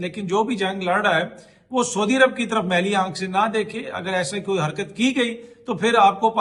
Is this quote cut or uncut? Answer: uncut